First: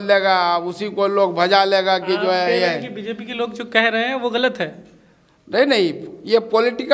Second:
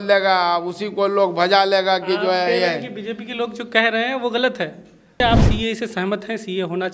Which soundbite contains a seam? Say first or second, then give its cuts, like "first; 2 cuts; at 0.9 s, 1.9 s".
second; 1 cut; at 5.2 s